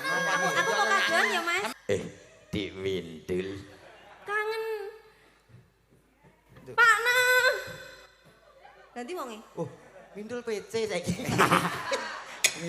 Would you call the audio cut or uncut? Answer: cut